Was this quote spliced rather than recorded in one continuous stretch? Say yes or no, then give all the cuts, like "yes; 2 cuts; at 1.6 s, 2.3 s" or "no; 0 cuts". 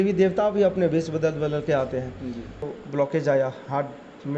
yes; 1 cut; at 2.6 s